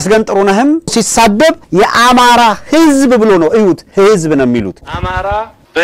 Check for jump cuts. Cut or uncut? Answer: cut